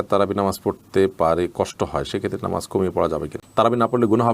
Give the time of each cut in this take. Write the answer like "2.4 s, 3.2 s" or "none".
3.4 s